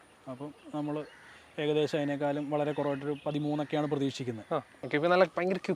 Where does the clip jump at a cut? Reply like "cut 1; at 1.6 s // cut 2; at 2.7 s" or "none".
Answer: cut 1; at 4.8 s